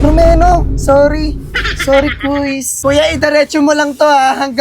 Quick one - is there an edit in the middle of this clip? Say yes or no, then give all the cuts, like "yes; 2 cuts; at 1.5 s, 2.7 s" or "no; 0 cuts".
yes; 1 cut; at 2.7 s